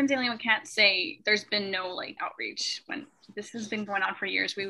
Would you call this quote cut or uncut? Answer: cut